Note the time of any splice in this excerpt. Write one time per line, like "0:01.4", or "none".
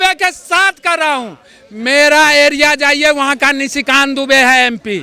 none